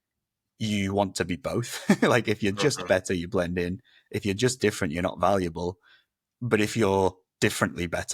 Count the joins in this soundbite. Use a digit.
0